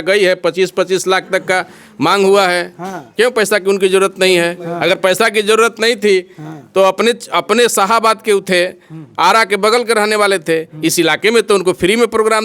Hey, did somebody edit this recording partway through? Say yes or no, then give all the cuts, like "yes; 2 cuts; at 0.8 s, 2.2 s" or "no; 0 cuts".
no; 0 cuts